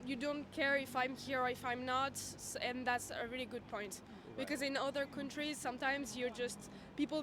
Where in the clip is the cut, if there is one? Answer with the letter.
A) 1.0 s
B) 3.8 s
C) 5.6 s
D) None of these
D